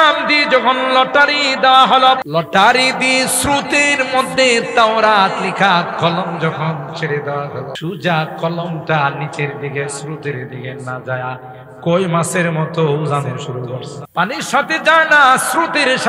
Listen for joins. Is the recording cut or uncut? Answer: cut